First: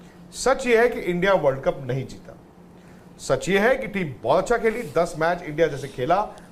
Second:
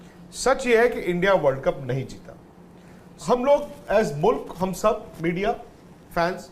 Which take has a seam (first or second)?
second